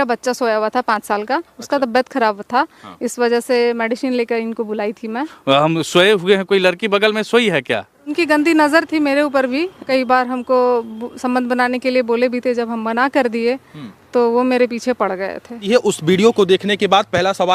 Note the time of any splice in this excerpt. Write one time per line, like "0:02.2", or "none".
0:05.3
0:08.1
0:09.8
0:15.7

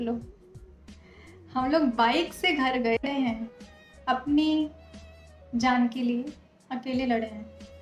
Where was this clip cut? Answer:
0:03.0

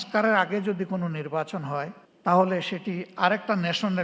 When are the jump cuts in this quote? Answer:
none

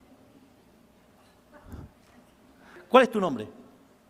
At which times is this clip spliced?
0:02.7

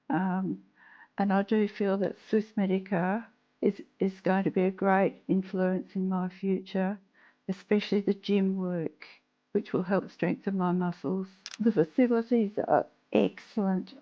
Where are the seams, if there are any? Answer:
0:11.4

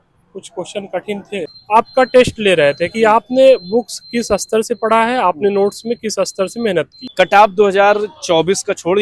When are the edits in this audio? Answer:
0:01.6
0:07.0

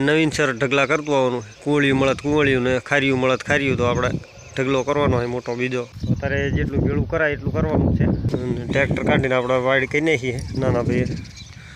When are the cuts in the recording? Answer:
0:01.5
0:05.9
0:08.3

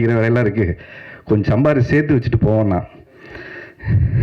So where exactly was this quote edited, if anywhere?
none

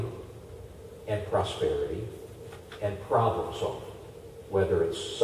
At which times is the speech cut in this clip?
none

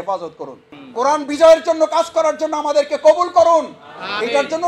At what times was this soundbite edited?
none

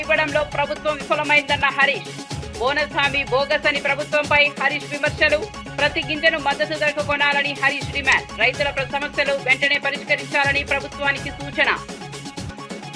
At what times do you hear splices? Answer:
none

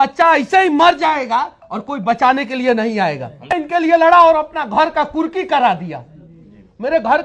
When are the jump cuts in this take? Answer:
0:03.5

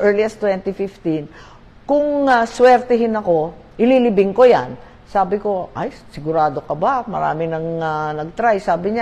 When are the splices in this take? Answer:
none

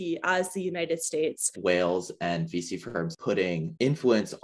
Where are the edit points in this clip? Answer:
0:01.5
0:03.1

